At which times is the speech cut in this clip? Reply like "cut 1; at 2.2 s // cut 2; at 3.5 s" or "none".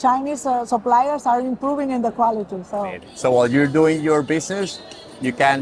cut 1; at 2.8 s